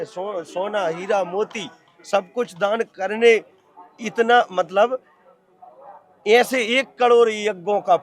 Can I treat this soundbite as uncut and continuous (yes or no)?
yes